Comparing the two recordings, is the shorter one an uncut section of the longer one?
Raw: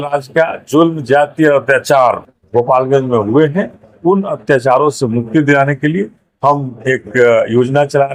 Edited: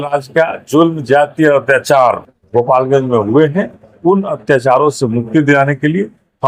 yes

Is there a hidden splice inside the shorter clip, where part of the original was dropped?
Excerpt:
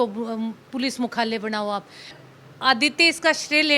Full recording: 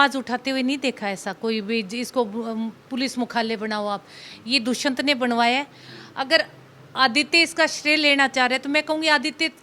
yes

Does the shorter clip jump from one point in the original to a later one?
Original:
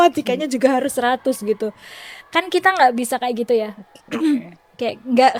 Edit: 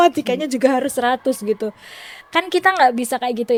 no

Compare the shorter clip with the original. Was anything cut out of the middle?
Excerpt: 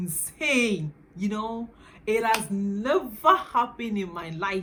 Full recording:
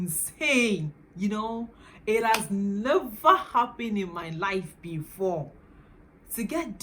no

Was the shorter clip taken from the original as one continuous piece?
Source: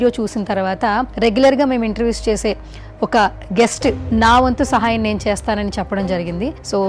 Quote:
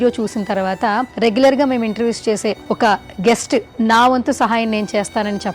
no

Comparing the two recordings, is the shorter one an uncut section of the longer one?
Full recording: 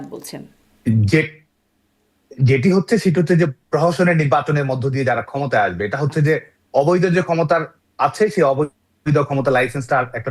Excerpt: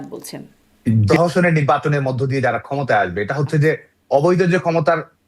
no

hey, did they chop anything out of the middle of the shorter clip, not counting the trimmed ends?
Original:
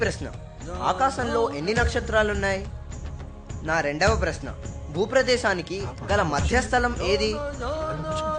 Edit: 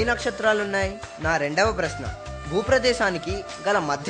yes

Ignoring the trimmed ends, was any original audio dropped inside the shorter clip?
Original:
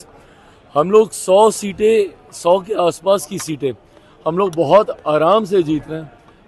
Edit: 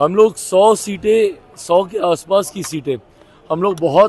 no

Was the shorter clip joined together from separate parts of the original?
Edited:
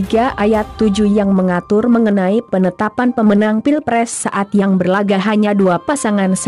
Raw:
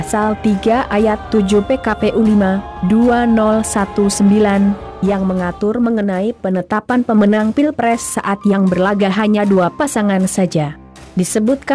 yes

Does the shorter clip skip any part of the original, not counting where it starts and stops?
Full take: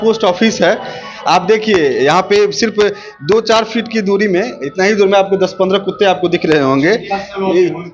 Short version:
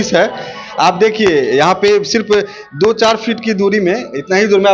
no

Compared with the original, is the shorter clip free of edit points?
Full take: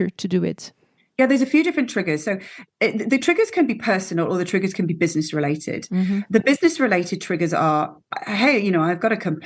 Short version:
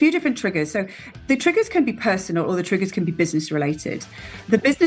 no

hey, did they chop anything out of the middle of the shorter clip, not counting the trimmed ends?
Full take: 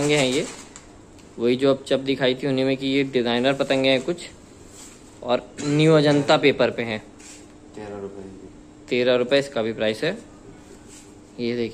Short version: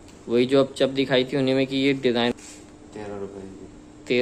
yes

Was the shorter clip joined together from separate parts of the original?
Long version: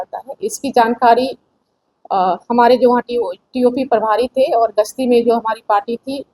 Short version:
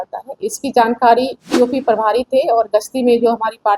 yes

